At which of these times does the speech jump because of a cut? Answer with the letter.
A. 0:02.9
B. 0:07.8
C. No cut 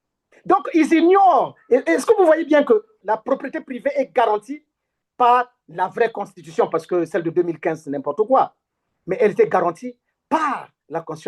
A